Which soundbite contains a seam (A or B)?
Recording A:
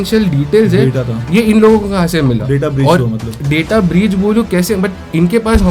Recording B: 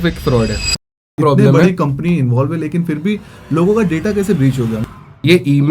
B